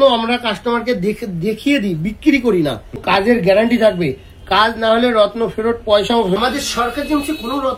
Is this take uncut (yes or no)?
no